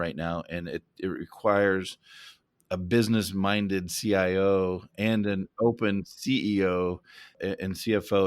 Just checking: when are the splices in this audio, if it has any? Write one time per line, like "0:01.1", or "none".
0:07.3